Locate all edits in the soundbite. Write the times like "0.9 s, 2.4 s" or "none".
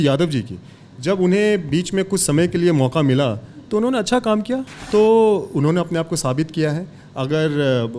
4.7 s